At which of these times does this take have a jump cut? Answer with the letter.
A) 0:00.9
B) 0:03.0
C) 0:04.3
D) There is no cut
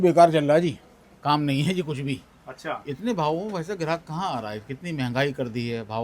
D